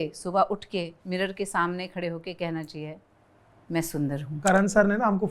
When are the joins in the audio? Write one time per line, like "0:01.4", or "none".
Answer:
0:01.0
0:04.3